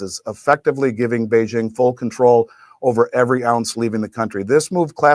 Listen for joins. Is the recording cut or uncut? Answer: uncut